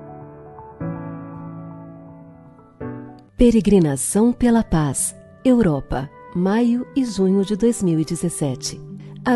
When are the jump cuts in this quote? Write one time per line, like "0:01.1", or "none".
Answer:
0:03.2